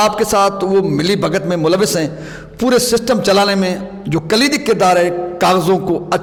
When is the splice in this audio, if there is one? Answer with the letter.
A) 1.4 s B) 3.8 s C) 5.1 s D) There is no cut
D